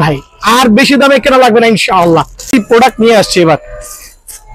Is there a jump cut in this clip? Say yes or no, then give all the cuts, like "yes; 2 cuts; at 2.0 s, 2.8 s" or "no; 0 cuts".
yes; 1 cut; at 2.4 s